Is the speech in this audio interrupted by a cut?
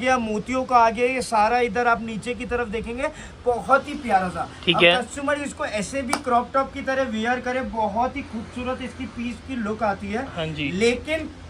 no; 0 cuts

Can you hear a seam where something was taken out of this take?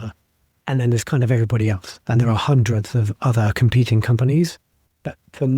no; 0 cuts

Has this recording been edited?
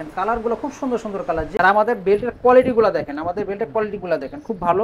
yes; 1 cut; at 1.5 s

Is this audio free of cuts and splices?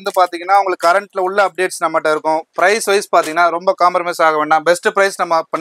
yes; 0 cuts

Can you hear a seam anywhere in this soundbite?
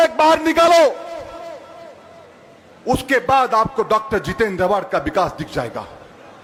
no; 0 cuts

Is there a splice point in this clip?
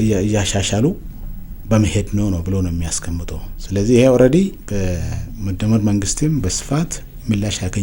no; 0 cuts

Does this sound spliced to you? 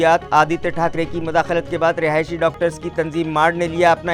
no; 0 cuts

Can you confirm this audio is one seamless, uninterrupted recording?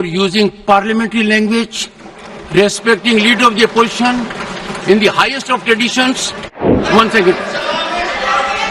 no; 1 cut; at 6.8 s

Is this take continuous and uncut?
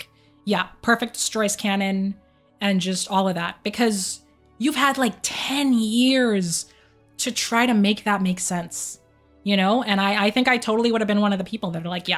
yes; 0 cuts

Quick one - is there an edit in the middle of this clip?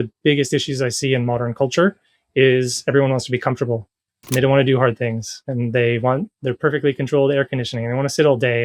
no; 0 cuts

